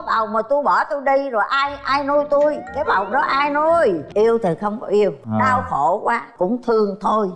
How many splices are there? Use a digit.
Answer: 3